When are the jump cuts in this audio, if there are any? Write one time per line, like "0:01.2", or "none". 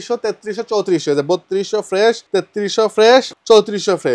0:02.2
0:03.3